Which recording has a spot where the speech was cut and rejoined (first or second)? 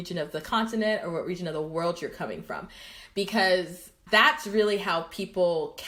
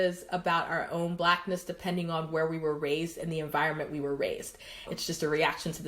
second